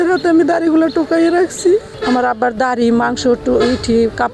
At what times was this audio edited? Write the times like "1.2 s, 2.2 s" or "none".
1.9 s